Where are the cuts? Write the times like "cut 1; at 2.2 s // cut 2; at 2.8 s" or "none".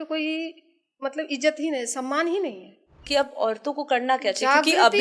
cut 1; at 3.0 s